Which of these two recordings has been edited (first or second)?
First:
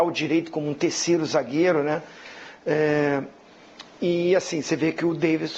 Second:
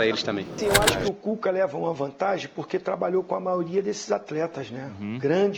second